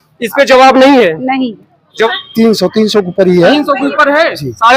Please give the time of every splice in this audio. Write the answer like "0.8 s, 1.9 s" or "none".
2.1 s